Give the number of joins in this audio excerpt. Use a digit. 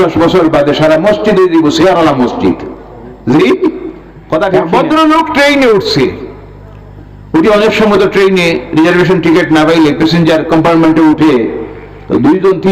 1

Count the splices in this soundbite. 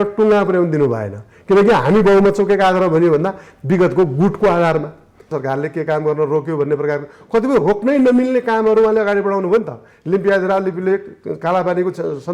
1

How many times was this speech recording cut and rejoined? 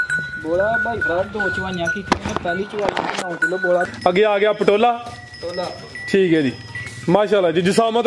1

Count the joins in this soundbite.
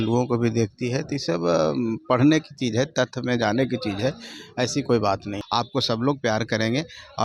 1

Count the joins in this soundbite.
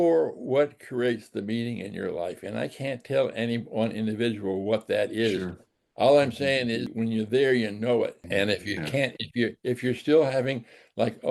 2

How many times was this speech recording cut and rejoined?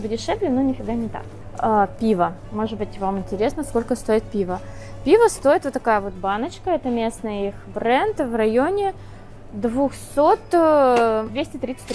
0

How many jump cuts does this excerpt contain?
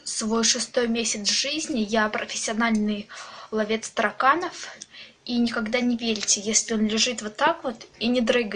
1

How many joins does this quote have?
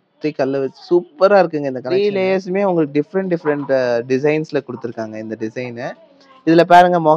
1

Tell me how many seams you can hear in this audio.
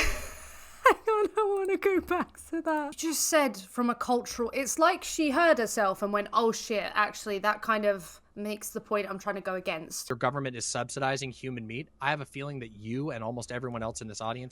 2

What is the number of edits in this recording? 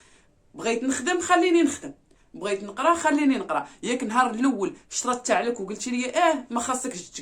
0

